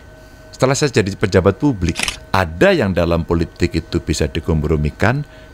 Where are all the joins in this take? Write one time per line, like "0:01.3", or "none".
0:02.0

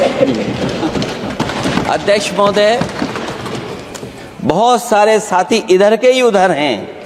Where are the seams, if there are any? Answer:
0:01.4

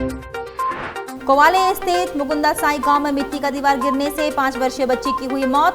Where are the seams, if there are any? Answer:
0:01.1

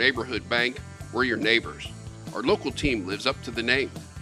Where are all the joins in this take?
none

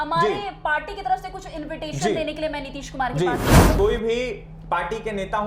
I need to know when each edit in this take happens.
0:03.7

